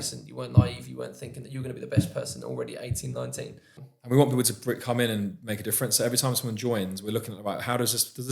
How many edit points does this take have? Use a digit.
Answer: 1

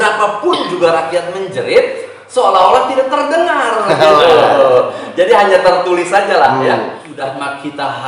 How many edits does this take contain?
1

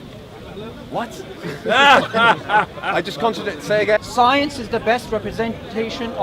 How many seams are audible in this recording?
1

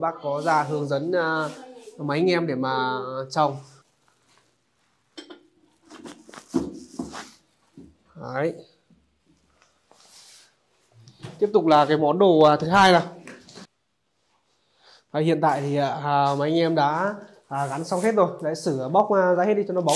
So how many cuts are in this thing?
2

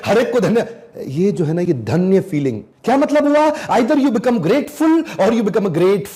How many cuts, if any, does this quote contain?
0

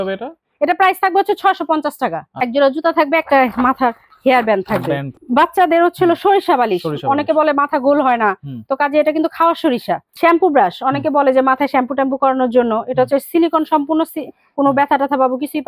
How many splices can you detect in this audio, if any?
3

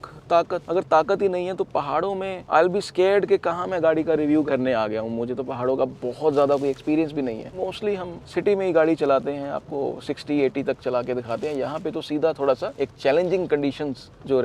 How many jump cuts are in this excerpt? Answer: 1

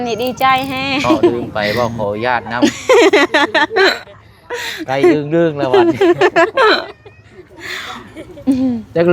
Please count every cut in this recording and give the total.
1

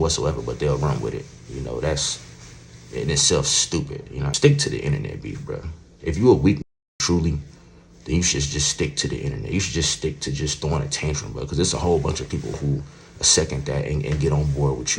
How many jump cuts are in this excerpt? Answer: 1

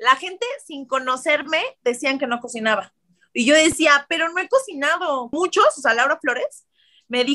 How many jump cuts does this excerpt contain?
1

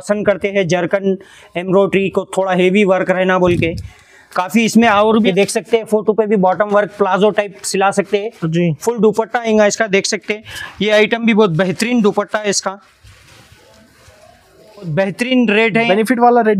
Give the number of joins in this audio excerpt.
2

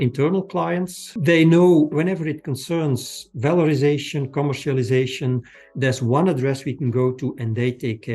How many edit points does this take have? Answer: 1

